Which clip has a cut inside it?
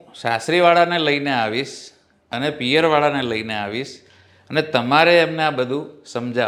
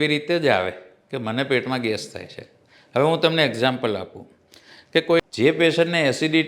second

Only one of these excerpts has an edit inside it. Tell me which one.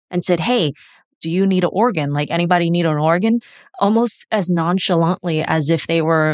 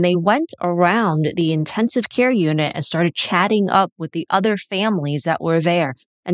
first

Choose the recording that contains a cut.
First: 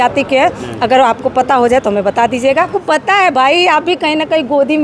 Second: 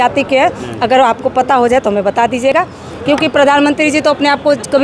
first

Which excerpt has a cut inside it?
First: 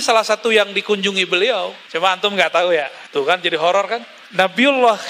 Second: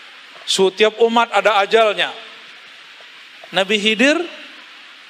first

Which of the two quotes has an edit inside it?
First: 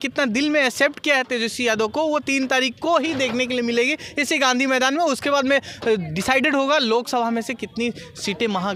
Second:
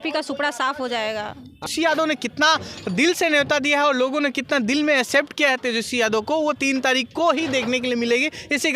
second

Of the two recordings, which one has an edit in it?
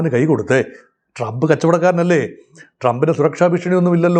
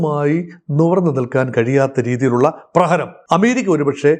second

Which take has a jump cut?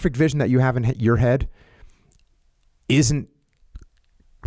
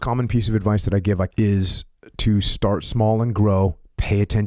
second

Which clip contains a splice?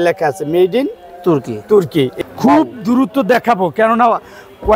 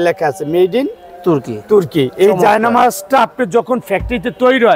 first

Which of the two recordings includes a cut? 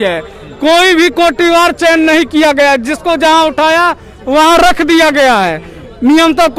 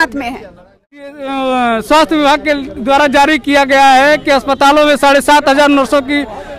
second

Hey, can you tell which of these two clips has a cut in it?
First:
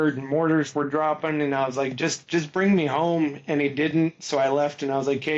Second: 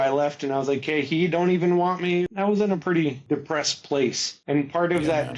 second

